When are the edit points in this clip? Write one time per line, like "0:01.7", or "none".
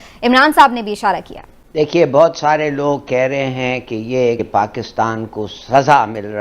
0:04.4